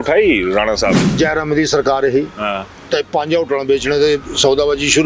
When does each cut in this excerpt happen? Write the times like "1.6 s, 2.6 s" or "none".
1.1 s